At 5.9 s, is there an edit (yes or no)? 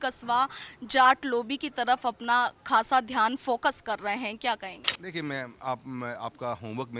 no